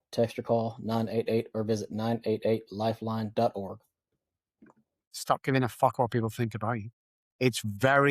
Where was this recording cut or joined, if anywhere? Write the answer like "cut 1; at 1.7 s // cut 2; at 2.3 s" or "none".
cut 1; at 5.1 s